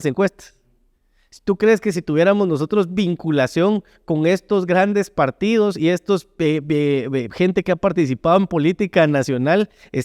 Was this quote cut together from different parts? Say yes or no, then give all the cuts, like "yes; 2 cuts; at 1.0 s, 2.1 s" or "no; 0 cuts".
no; 0 cuts